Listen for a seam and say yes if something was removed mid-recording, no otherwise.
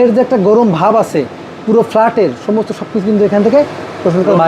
no